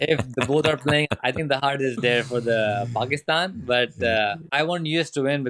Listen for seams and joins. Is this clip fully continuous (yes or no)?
no